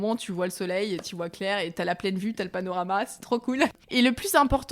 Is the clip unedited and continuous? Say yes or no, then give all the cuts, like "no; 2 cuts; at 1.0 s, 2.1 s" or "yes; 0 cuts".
no; 1 cut; at 3.7 s